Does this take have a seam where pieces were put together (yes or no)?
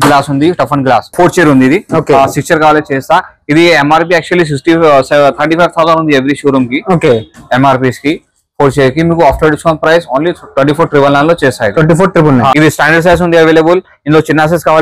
yes